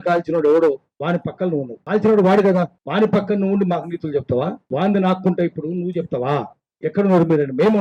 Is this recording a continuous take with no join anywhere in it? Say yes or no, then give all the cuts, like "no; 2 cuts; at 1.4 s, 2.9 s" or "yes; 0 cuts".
no; 3 cuts; at 1.8 s, 2.8 s, 4.6 s